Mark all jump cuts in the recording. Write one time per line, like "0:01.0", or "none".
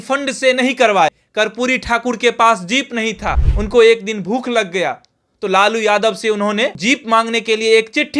0:01.2
0:03.5
0:06.8

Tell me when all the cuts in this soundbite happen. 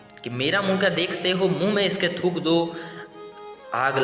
none

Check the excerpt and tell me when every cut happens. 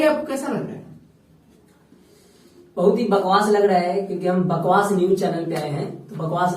none

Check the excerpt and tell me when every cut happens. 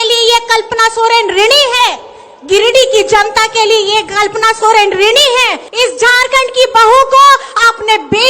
0:05.6

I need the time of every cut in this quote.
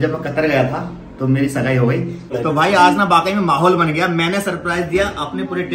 0:02.2

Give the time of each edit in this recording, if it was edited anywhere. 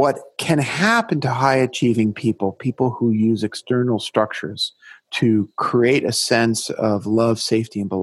none

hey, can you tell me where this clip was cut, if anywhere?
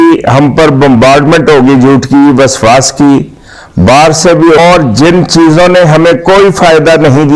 0:04.6

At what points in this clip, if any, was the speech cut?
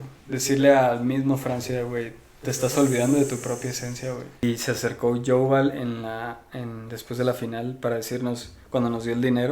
0:04.4

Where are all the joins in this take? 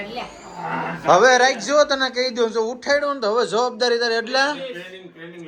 none

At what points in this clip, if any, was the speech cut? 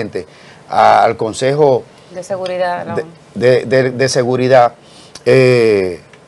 none

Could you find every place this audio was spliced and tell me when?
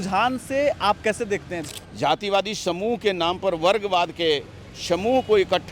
0:01.6

